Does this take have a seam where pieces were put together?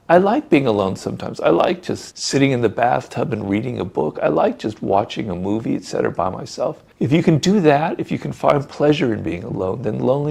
no; 0 cuts

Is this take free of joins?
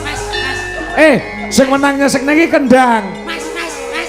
yes; 0 cuts

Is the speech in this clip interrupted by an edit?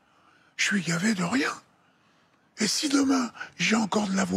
no; 0 cuts

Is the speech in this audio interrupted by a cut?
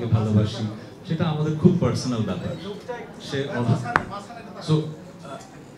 no; 0 cuts

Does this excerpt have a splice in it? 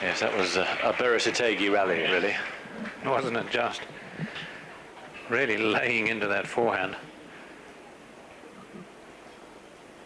yes; 1 cut; at 1.9 s

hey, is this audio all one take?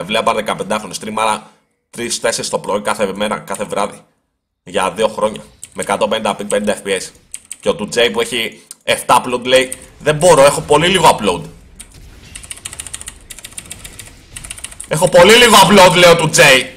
yes; 0 cuts

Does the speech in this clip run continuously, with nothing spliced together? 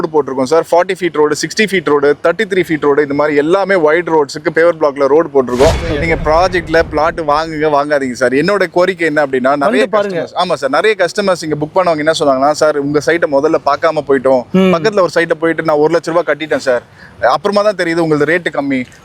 no; 1 cut; at 5.9 s

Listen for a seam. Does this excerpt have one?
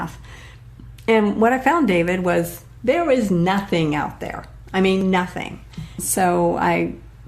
yes; 1 cut; at 6.0 s

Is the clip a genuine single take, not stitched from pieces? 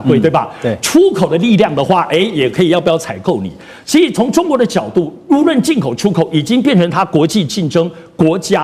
yes; 0 cuts

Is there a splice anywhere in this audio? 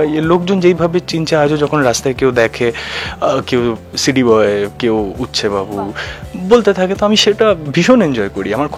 no; 0 cuts

